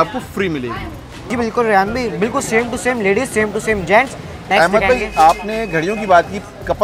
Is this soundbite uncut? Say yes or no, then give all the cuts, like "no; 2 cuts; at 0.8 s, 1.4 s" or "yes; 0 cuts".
no; 2 cuts; at 1.3 s, 4.5 s